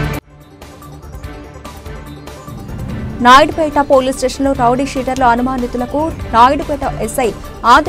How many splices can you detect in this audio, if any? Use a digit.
1